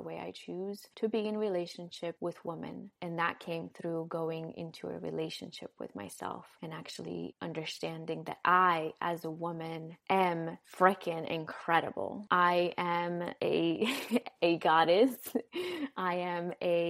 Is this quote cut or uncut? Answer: uncut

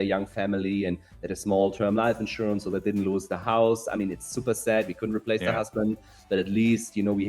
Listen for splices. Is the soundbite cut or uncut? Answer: uncut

